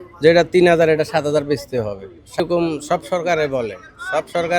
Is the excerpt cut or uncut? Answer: cut